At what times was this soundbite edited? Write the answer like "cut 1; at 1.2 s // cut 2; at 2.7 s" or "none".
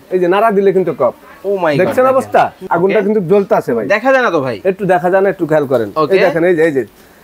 cut 1; at 2.6 s